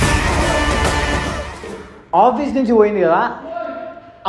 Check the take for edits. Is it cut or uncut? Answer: cut